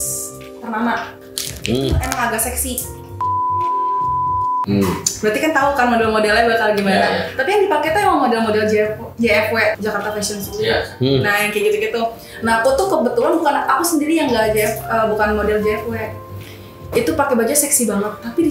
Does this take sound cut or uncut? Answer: cut